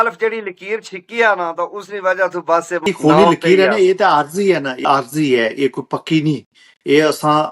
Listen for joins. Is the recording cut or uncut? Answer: cut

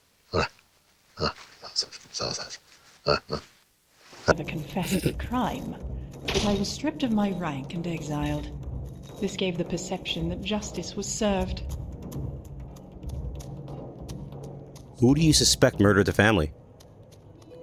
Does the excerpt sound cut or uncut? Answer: cut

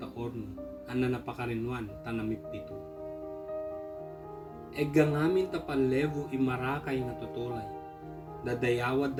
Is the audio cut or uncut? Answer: uncut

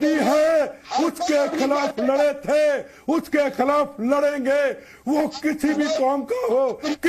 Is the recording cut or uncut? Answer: uncut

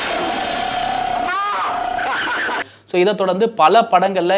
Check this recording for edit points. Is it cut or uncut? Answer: uncut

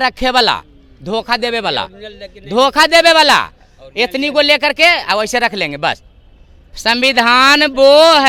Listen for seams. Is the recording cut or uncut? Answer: uncut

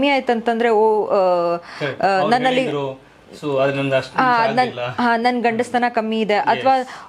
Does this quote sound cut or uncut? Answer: uncut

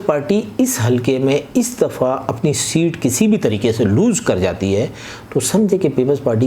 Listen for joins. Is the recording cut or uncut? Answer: uncut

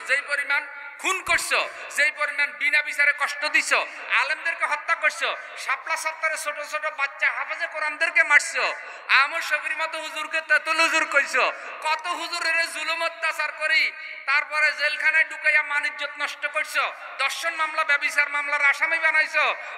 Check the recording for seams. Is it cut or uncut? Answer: uncut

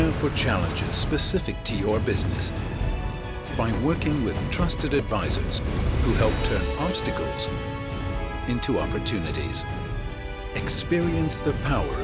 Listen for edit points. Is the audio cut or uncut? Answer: uncut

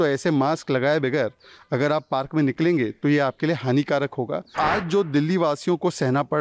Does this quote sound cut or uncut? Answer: cut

